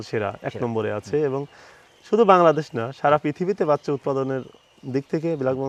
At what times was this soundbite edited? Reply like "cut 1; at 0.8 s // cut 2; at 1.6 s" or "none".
none

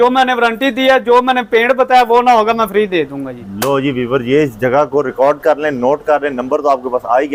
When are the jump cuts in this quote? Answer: none

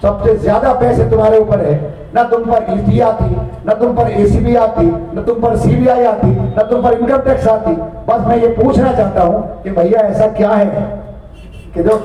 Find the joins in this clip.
none

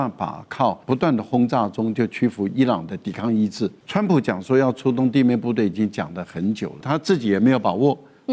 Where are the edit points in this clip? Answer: cut 1; at 0.8 s // cut 2; at 3.8 s // cut 3; at 6.8 s

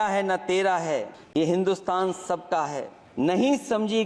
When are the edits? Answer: cut 1; at 1.2 s // cut 2; at 3.0 s

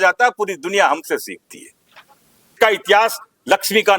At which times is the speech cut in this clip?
cut 1; at 2.5 s

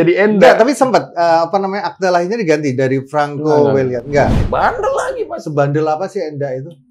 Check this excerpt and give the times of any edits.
cut 1; at 4.3 s

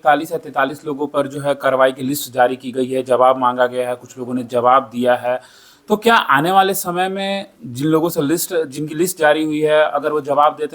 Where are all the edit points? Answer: none

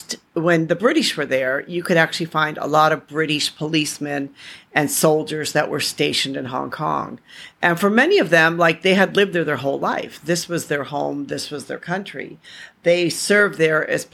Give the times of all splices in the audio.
none

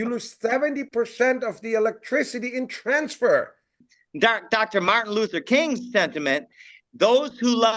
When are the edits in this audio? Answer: cut 1; at 3.8 s

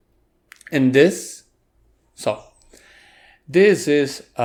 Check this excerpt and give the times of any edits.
none

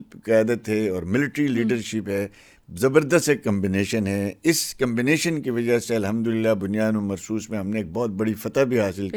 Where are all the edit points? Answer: none

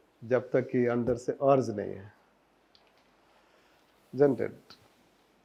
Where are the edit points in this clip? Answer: none

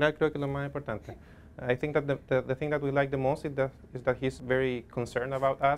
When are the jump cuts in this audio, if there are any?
cut 1; at 4.4 s

